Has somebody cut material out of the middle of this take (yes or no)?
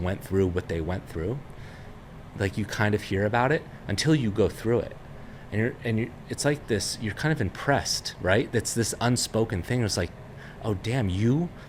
no